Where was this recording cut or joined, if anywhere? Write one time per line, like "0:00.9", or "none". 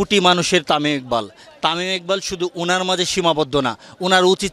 none